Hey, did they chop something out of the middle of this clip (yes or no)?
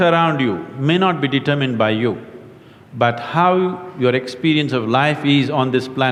no